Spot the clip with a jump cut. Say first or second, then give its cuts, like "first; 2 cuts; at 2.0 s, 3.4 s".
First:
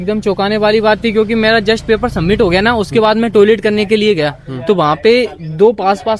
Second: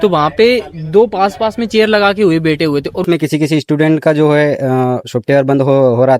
second; 1 cut; at 3.0 s